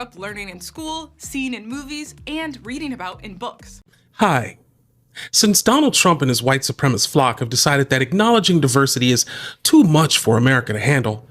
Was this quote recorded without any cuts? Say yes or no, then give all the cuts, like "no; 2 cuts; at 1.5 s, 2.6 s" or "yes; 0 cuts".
no; 1 cut; at 3.7 s